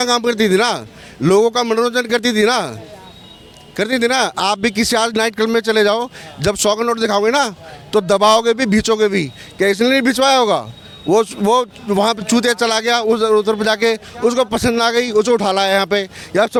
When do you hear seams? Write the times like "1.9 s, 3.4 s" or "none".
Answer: none